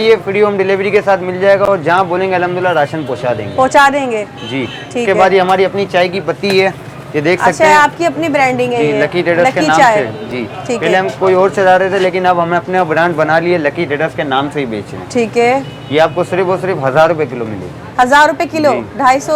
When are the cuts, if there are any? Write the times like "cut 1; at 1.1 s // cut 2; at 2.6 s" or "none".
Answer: none